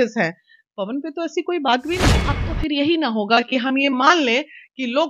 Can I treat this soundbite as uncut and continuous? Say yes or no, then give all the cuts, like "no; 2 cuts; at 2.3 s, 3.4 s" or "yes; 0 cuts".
no; 1 cut; at 2.2 s